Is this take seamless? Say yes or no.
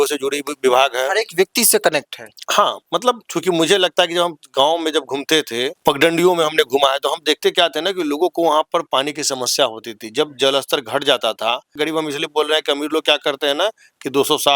no